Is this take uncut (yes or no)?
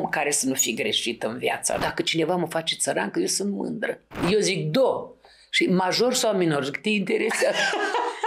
no